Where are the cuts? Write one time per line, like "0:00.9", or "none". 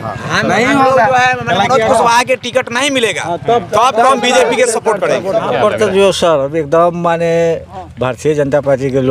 0:05.5